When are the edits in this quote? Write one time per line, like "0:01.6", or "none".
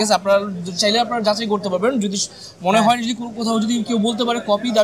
none

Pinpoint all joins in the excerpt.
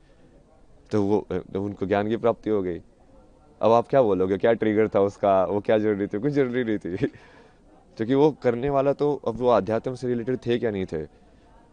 none

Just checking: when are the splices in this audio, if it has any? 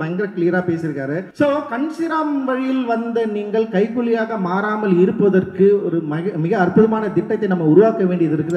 0:01.3

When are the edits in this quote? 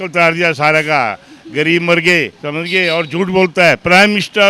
0:02.4

